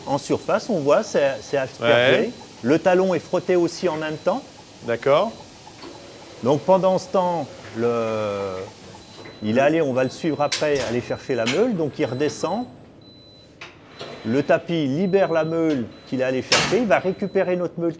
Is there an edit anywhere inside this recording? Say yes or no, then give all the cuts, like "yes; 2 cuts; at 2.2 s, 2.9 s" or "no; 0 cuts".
no; 0 cuts